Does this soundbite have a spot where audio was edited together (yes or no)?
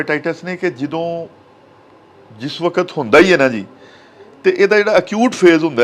no